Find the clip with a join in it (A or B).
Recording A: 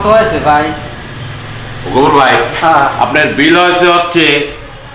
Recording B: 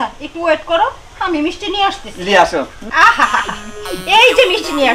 B